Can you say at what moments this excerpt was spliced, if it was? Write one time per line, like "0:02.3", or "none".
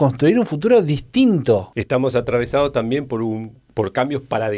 0:01.7